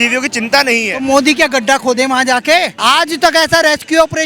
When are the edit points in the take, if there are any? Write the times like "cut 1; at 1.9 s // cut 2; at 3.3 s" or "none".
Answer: cut 1; at 2.7 s

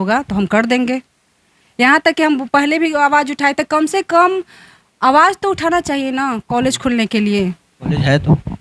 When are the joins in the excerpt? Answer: none

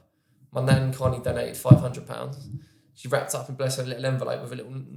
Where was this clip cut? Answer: none

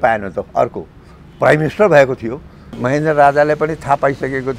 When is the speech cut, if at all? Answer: cut 1; at 2.7 s

